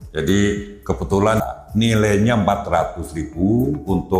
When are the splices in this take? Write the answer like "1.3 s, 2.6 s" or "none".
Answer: 1.4 s